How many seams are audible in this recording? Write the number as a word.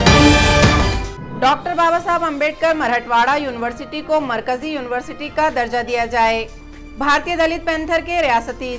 one